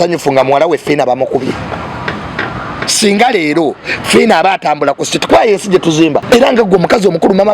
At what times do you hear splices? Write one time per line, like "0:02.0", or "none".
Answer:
0:06.2